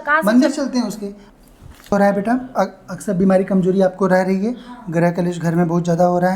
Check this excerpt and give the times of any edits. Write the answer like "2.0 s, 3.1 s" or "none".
1.1 s